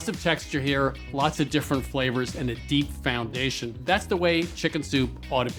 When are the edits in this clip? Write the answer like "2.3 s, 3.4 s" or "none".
3.7 s